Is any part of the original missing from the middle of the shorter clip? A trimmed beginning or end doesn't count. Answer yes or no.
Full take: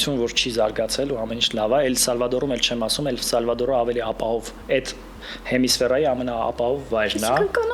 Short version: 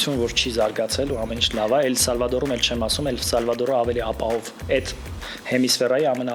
no